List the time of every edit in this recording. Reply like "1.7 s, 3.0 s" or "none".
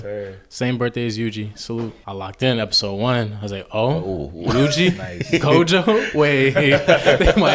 2.0 s